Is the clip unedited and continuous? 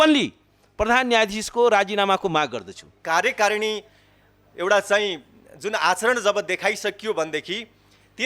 no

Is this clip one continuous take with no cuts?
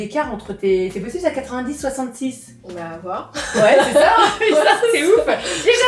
yes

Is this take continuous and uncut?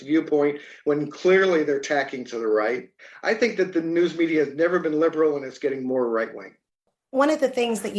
yes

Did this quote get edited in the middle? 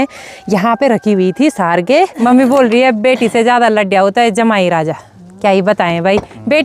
yes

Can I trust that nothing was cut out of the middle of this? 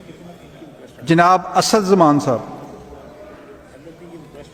yes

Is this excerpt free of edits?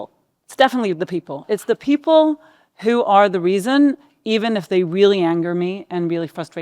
no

